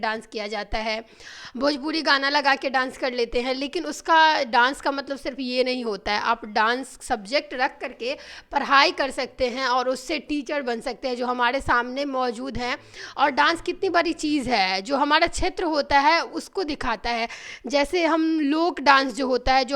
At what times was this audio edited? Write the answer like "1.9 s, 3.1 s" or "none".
none